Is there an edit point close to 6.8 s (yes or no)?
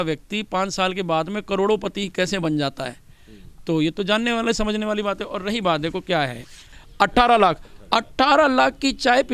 yes